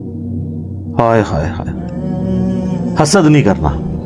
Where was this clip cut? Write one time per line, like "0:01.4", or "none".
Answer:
0:01.6
0:02.9